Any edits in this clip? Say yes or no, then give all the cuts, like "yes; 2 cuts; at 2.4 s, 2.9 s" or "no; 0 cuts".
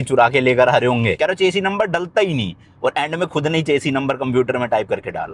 yes; 1 cut; at 1.2 s